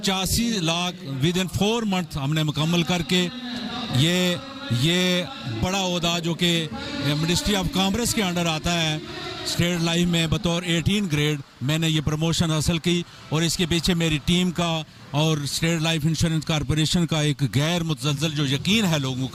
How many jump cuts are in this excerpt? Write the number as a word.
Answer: zero